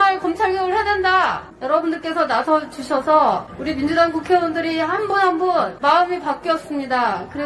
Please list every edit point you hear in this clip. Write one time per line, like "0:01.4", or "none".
0:01.5
0:03.5
0:05.7